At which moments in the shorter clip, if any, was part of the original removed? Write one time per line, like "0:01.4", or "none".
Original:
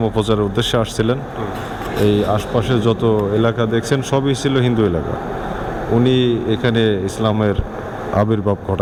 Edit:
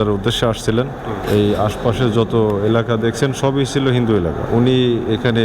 0:01.2
0:04.4